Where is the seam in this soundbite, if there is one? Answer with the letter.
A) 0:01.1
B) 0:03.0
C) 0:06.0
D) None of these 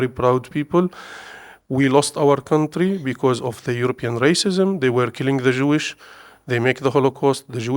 D